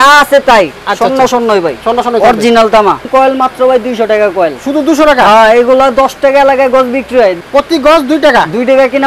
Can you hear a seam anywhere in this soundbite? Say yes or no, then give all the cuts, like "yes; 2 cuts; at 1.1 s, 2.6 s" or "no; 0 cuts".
yes; 2 cuts; at 3.1 s, 7.4 s